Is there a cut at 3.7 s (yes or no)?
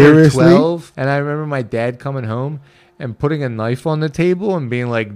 no